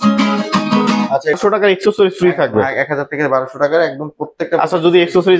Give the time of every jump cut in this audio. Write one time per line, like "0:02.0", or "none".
0:01.4

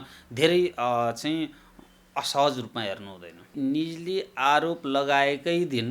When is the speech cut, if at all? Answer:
0:03.5

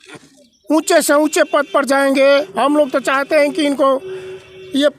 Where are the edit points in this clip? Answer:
0:02.5

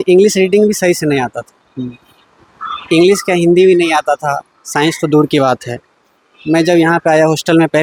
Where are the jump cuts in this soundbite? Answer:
none

